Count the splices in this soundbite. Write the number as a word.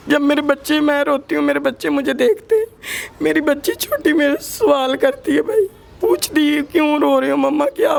zero